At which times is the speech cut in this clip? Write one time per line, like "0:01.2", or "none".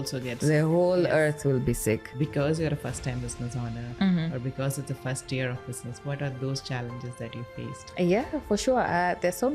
0:02.1